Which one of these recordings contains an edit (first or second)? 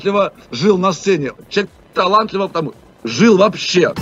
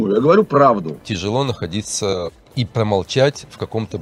second